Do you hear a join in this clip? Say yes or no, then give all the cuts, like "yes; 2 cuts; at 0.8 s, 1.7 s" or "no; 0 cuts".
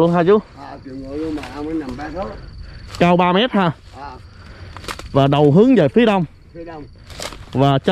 no; 0 cuts